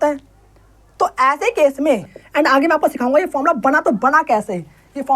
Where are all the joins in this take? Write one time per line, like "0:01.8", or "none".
0:02.2